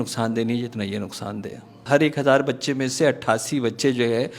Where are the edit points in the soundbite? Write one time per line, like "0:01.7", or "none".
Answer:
0:01.8